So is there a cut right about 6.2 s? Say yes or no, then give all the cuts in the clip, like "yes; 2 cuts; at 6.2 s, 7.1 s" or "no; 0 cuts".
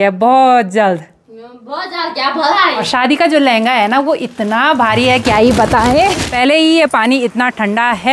yes; 2 cuts; at 2.8 s, 6.2 s